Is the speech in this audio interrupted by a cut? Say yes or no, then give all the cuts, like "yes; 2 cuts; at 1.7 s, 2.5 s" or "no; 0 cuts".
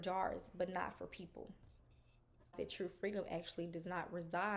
yes; 1 cut; at 2.5 s